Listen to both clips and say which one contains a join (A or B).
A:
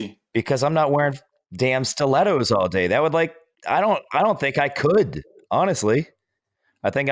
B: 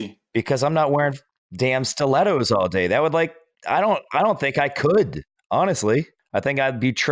B